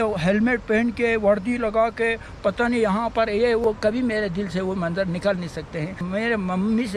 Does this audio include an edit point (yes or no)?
yes